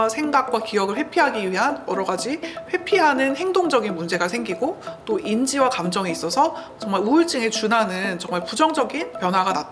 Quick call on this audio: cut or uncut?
uncut